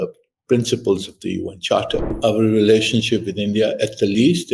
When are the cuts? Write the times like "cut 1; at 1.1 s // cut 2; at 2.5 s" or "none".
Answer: cut 1; at 2.1 s